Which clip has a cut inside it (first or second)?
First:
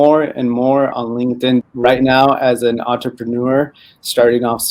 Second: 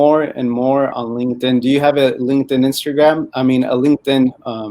first